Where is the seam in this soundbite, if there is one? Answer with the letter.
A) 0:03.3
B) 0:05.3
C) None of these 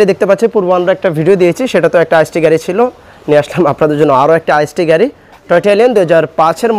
B